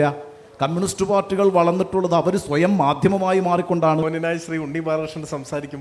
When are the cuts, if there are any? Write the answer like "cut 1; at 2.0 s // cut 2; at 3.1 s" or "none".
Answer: cut 1; at 4.0 s

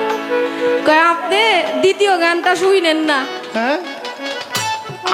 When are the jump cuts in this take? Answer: cut 1; at 3.4 s

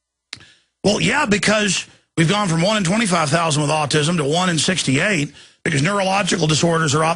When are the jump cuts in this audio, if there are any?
cut 1; at 4.8 s

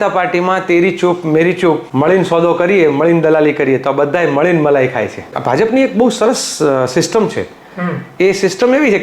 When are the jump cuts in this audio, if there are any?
cut 1; at 1.9 s // cut 2; at 5.3 s

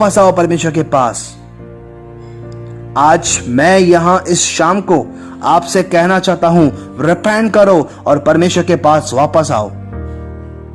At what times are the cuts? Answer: cut 1; at 9.8 s

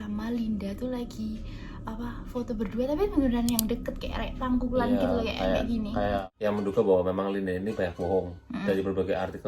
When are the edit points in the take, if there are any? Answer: cut 1; at 6.2 s

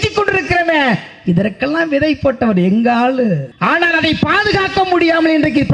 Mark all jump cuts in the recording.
cut 1; at 3.5 s

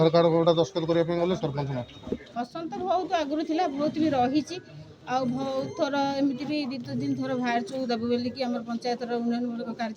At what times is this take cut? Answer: cut 1; at 2.3 s

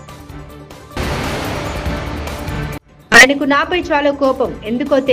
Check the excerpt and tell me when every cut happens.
cut 1; at 0.9 s // cut 2; at 2.9 s

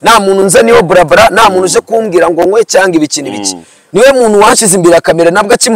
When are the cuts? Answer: cut 1; at 3.8 s

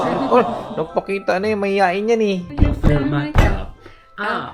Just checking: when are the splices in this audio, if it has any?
cut 1; at 2.5 s

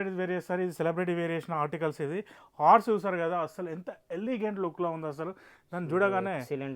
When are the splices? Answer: none

